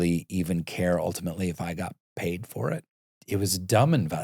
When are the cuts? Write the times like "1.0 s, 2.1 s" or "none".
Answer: 3.0 s